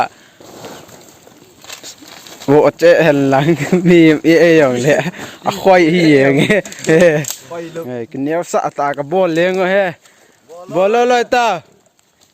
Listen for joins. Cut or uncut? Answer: cut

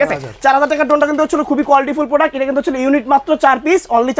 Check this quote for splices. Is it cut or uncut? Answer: uncut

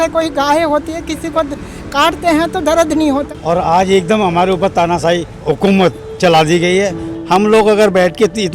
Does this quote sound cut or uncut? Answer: cut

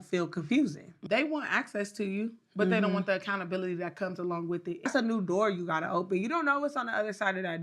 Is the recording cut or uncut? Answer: cut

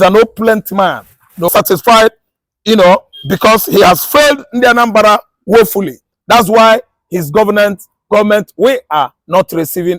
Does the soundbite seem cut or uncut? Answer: cut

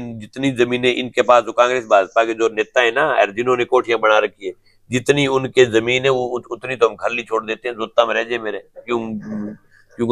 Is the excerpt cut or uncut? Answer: uncut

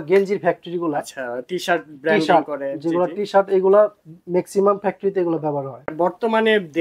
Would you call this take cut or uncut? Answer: cut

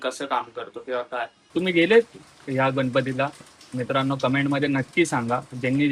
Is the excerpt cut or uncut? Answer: cut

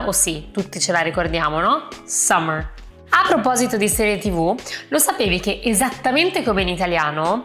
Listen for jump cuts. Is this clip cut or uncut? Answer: uncut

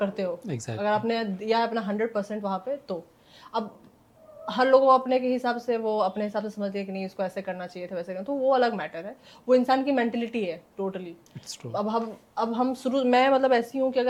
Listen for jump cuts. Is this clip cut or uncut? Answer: uncut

